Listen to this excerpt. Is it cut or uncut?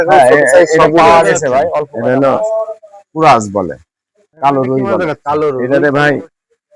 cut